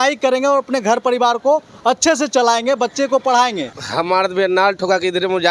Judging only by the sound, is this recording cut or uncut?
cut